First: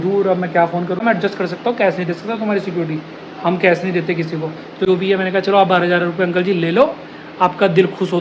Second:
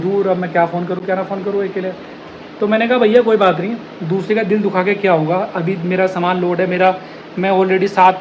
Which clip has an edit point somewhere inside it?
first; 2 cuts; at 1.0 s, 4.8 s

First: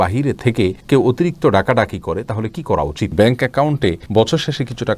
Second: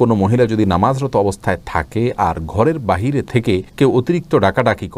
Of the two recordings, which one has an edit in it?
first; 1 cut; at 3.1 s

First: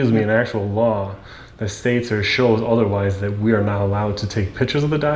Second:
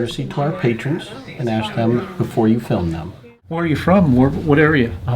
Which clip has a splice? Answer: second; 1 cut; at 3.6 s

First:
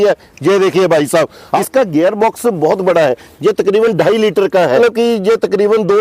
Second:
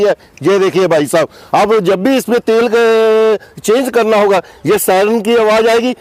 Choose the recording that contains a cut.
first; 2 cuts; at 1.5 s, 4.8 s

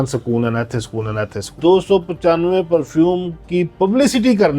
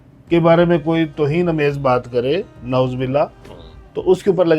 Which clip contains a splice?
first; 1 cut; at 1.5 s

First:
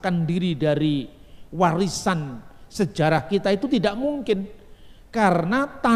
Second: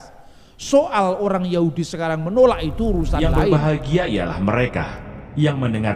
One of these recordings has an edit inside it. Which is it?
second; 1 cut; at 3.4 s

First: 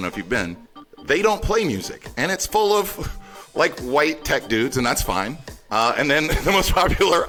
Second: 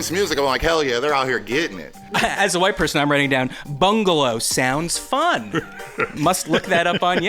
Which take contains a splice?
second; 2 cuts; at 2.1 s, 6.2 s

